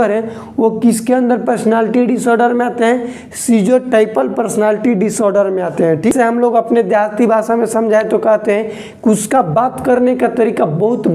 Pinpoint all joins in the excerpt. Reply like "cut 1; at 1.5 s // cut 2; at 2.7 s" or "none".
cut 1; at 6.1 s